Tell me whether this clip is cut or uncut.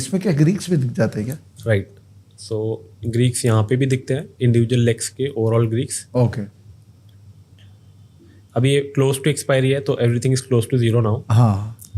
uncut